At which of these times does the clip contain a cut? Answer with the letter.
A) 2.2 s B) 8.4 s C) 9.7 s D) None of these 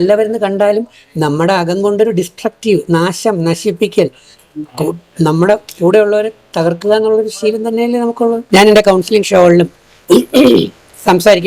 B